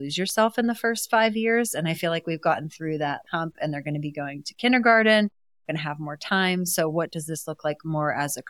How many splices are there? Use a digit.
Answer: 0